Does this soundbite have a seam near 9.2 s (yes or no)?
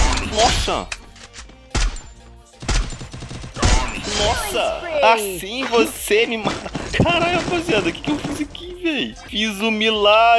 yes